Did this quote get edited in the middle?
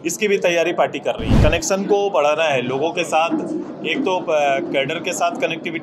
yes; 1 cut; at 1.4 s

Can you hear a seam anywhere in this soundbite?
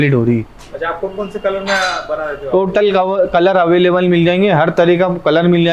no; 0 cuts

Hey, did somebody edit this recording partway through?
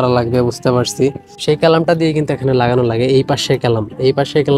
yes; 1 cut; at 1.3 s

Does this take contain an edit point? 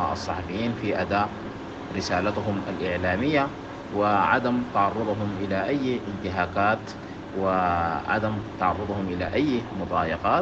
no; 0 cuts

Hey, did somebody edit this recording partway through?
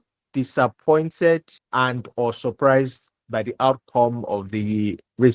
yes; 1 cut; at 1.1 s

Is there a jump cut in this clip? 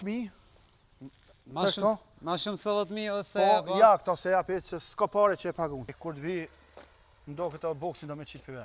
yes; 1 cut; at 6.0 s

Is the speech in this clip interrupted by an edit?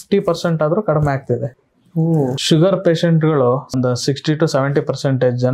yes; 2 cuts; at 2.1 s, 3.7 s

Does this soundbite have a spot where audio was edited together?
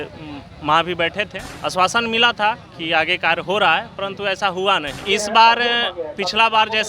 yes; 2 cuts; at 1.4 s, 5.0 s

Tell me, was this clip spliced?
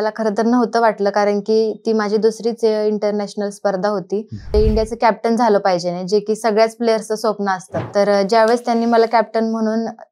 yes; 2 cuts; at 4.5 s, 7.7 s

